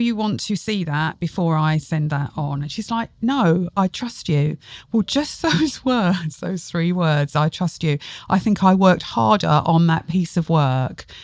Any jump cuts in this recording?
no; 0 cuts

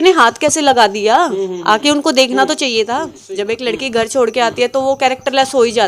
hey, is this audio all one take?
no; 1 cut; at 3.1 s

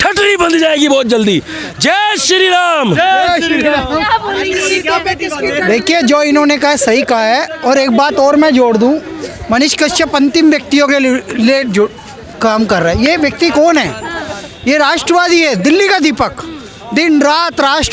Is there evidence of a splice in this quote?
no; 0 cuts

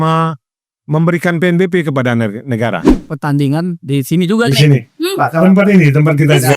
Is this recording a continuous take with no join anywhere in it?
no; 1 cut; at 2.9 s

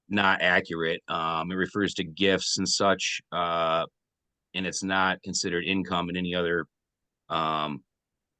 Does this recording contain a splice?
no; 0 cuts

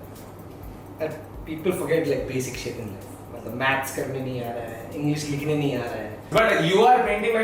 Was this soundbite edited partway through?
yes; 1 cut; at 6.2 s

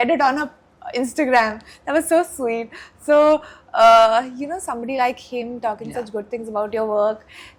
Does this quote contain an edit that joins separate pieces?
no; 0 cuts

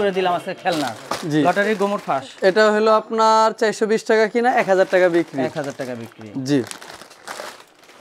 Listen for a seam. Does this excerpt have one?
no; 0 cuts

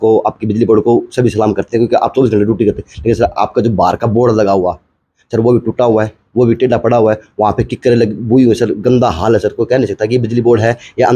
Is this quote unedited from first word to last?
yes; 0 cuts

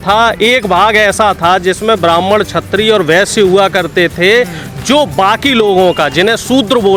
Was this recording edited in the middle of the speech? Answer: no; 0 cuts

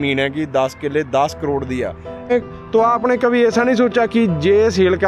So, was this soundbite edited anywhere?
yes; 1 cut; at 2.3 s

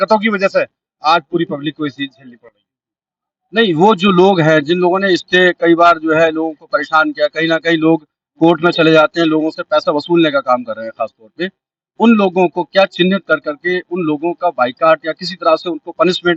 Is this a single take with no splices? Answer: yes; 0 cuts

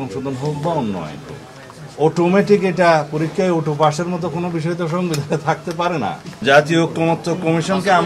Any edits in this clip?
yes; 1 cut; at 6.4 s

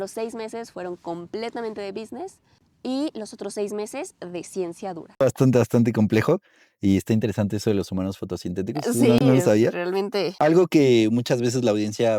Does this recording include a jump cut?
no; 0 cuts

